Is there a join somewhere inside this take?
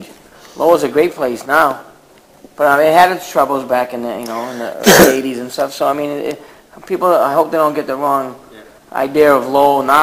no; 0 cuts

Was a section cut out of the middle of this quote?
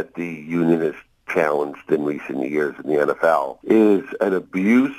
yes; 1 cut; at 3.5 s

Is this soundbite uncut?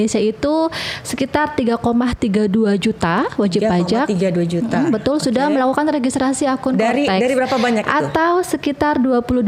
yes; 0 cuts

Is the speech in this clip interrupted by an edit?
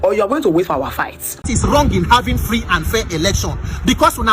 yes; 1 cut; at 1.5 s

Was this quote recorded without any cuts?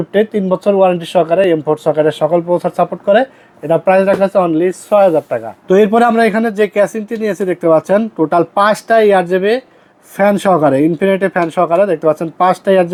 yes; 0 cuts

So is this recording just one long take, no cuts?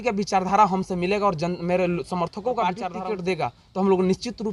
no; 1 cut; at 2.9 s

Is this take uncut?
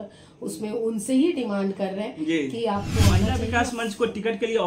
no; 1 cut; at 3.3 s

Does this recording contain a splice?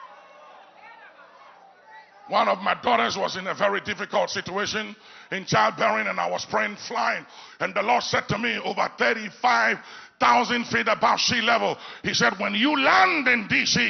yes; 1 cut; at 4.0 s

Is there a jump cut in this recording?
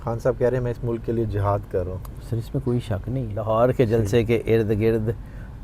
yes; 1 cut; at 3.3 s

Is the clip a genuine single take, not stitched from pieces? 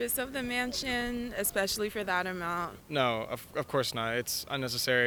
yes; 0 cuts

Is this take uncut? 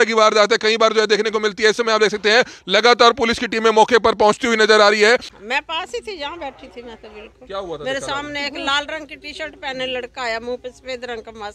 no; 1 cut; at 5.4 s

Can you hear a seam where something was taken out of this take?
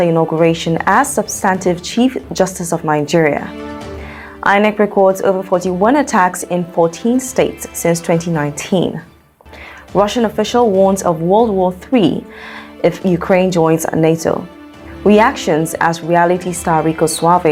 no; 0 cuts

